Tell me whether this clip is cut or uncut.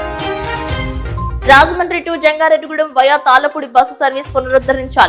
cut